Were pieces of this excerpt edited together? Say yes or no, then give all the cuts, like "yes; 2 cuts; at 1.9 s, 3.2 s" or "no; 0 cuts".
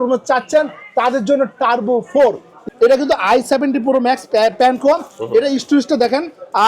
yes; 1 cut; at 2.6 s